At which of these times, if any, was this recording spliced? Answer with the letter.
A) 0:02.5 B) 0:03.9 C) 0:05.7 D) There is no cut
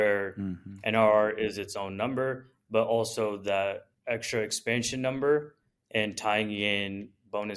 B